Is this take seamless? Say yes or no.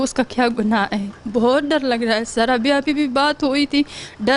no